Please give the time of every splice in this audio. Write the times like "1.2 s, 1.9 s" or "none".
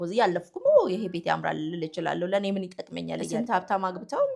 3.3 s